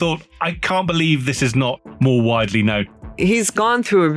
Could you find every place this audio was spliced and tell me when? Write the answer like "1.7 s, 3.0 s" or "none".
1.9 s, 3.0 s